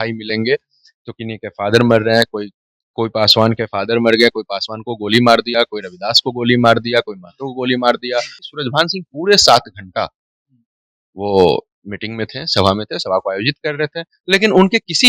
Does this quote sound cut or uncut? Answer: cut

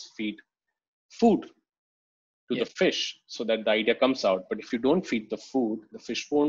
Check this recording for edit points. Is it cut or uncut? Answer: uncut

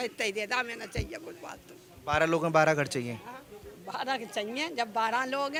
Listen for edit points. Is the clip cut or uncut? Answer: uncut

